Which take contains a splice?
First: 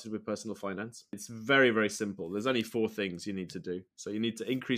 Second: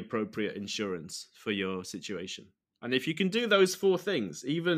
first; 1 cut; at 1.2 s

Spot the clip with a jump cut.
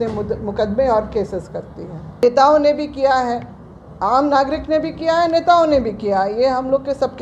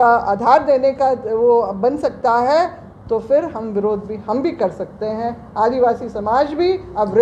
first; 1 cut; at 2.2 s

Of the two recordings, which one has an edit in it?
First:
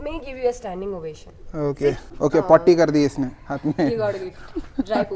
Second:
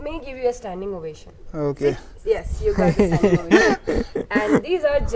first; 1 cut; at 2.1 s

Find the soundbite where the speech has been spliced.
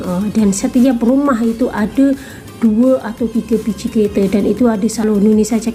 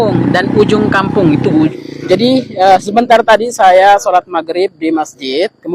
second; 1 cut; at 1.7 s

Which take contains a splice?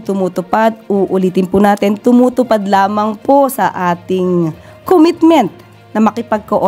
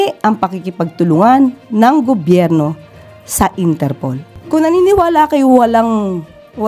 second; 1 cut; at 4.3 s

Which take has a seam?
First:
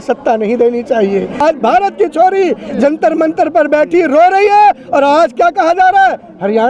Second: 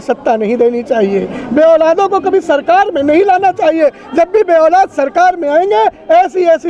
first; 1 cut; at 1.4 s

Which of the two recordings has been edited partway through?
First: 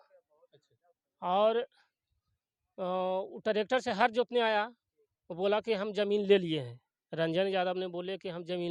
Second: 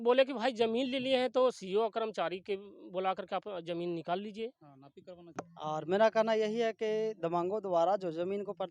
second; 1 cut; at 5.3 s

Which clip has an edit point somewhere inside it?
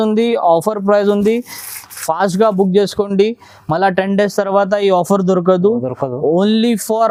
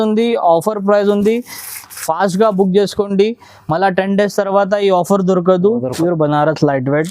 second; 1 cut; at 5.9 s

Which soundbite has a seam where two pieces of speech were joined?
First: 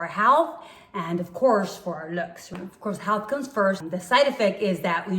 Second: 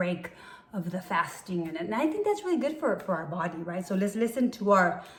first; 2 cuts; at 2.5 s, 3.8 s

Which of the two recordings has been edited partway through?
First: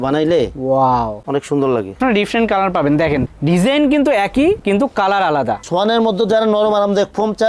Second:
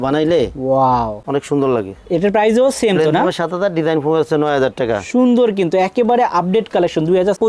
first; 2 cuts; at 2.0 s, 5.6 s

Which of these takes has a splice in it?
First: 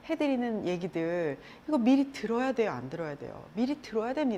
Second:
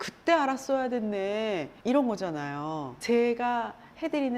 second; 2 cuts; at 1.7 s, 2.9 s

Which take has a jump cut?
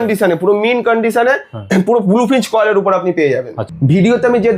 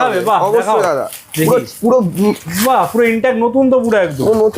first; 1 cut; at 3.6 s

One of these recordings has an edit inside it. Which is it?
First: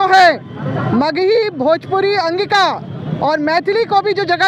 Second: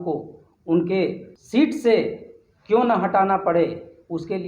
second; 1 cut; at 1.3 s

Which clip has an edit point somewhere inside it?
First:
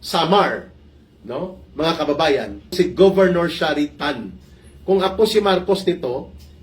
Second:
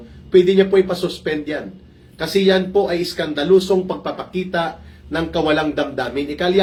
first; 1 cut; at 2.7 s

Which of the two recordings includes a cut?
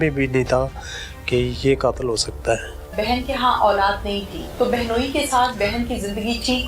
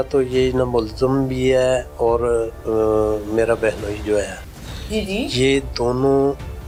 first; 2 cuts; at 2.9 s, 4.4 s

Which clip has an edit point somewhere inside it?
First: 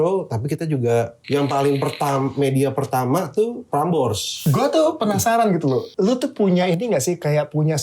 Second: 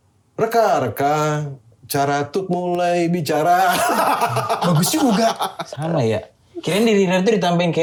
first; 3 cuts; at 1.2 s, 4.1 s, 5.9 s

